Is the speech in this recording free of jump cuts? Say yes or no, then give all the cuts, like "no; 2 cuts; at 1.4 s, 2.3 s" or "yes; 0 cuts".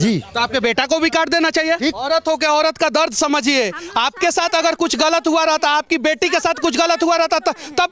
no; 1 cut; at 2.0 s